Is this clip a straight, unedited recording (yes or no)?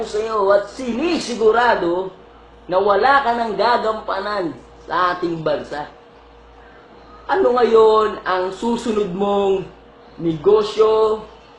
yes